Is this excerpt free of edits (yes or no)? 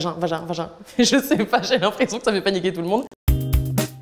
no